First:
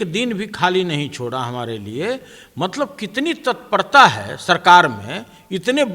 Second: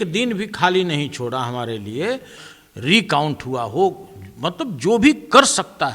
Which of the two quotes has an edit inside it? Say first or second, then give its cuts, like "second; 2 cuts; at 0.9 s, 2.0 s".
second; 1 cut; at 2.4 s